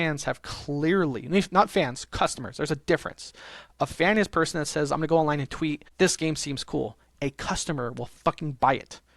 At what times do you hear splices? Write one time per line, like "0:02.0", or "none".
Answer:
0:05.8